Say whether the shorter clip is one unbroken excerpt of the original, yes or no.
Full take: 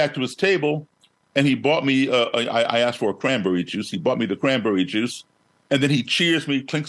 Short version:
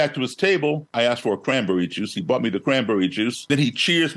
no